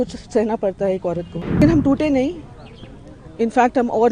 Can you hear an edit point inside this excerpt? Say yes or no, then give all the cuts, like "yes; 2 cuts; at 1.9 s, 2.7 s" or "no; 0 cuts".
yes; 1 cut; at 1.6 s